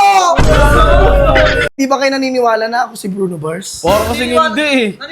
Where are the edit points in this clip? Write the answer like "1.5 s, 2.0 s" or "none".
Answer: 1.7 s